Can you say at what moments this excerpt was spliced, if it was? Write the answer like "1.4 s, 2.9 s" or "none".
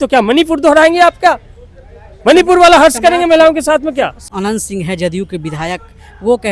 4.2 s